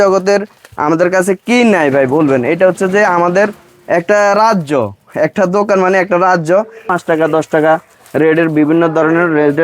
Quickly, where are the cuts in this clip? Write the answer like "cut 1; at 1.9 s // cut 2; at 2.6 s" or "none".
cut 1; at 6.9 s